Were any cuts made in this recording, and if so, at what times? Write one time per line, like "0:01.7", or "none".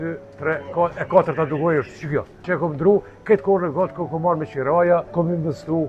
0:02.4
0:05.1